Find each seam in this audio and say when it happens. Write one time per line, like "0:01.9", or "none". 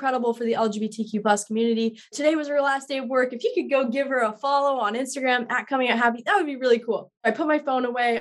0:02.2
0:07.2